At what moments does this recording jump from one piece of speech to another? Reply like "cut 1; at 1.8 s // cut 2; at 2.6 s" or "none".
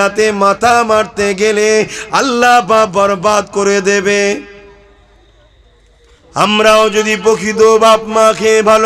cut 1; at 6.2 s